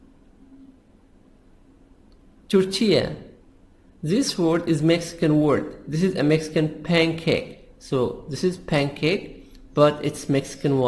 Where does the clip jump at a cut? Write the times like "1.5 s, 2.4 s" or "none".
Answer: 2.6 s